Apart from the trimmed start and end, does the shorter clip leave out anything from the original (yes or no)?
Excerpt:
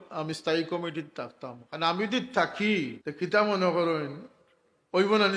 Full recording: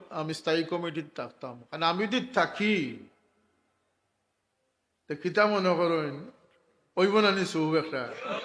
yes